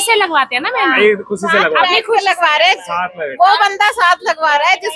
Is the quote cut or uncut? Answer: uncut